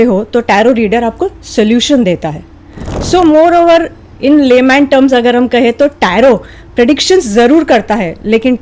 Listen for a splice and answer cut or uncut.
uncut